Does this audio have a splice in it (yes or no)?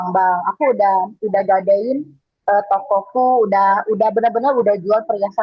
no